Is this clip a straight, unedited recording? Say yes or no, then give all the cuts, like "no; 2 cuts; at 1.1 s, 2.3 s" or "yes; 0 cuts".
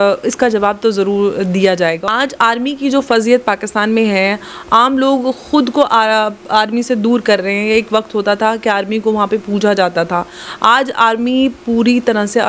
no; 1 cut; at 2.0 s